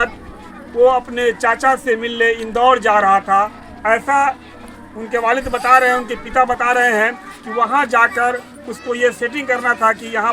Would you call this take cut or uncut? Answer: uncut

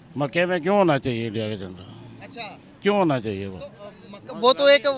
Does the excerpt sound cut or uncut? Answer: uncut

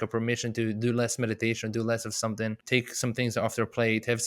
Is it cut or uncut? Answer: cut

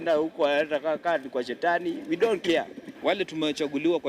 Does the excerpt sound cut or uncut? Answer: cut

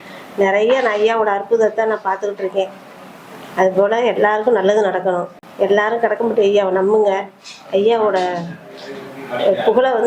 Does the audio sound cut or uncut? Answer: cut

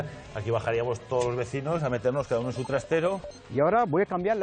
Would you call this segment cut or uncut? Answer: cut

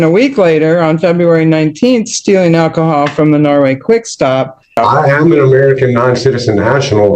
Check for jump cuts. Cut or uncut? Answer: cut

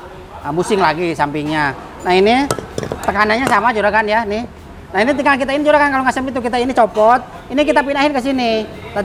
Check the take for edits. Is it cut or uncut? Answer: uncut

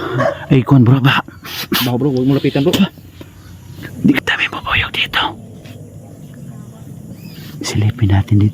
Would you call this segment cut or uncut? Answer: cut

